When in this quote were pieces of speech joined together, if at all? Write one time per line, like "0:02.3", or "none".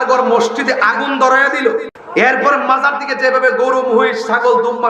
0:02.0